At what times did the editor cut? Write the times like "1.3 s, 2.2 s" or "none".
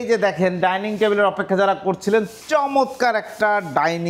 none